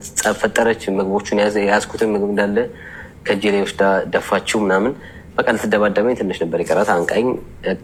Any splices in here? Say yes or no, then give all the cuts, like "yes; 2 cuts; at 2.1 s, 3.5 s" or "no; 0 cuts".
no; 0 cuts